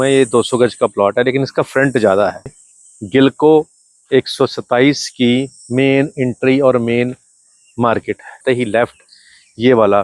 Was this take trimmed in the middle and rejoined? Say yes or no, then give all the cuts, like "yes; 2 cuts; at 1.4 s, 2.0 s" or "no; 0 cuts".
yes; 2 cuts; at 2.6 s, 8.4 s